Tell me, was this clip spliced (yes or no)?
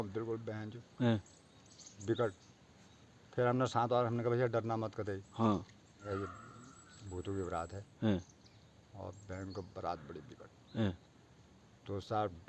yes